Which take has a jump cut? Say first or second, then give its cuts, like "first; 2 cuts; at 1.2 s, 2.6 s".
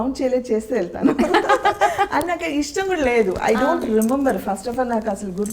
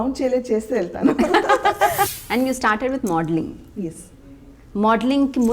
second; 1 cut; at 2.1 s